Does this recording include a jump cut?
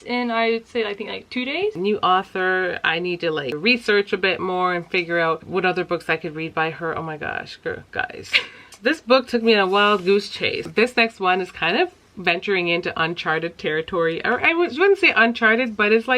yes; 5 cuts; at 1.8 s, 3.6 s, 5.5 s, 8.7 s, 10.7 s

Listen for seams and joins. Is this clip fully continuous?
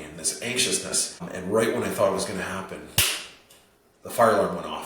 no; 1 cut; at 1.2 s

